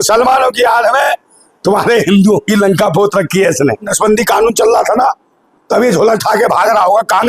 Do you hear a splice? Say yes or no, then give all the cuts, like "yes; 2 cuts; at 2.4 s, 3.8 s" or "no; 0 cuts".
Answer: yes; 1 cut; at 3.9 s